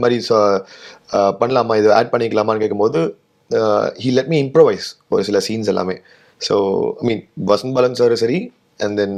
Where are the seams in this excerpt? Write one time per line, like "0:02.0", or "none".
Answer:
none